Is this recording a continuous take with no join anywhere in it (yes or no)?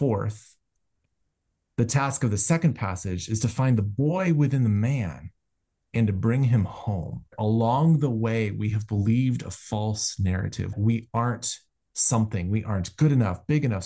no